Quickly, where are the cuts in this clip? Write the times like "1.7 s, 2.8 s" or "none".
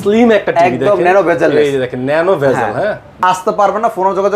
3.2 s